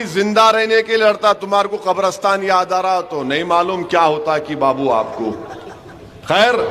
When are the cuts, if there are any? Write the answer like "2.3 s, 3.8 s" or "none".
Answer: none